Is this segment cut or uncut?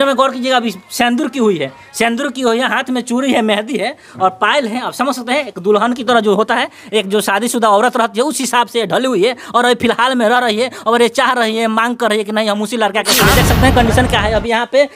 cut